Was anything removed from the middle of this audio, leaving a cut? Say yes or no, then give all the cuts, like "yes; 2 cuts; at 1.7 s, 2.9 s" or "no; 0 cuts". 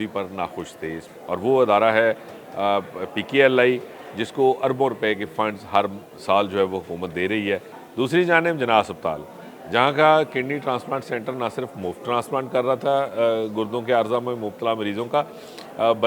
yes; 2 cuts; at 1.1 s, 7.8 s